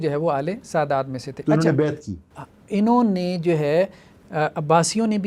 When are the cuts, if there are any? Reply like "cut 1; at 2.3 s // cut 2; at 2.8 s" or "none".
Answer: none